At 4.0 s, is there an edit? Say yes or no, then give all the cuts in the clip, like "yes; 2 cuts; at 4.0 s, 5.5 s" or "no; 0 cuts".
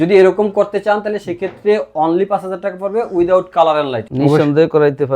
yes; 1 cut; at 4.0 s